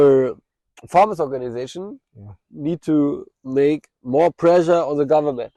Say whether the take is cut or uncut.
uncut